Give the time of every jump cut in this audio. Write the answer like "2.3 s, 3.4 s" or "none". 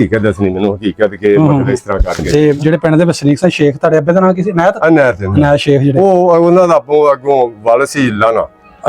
2.2 s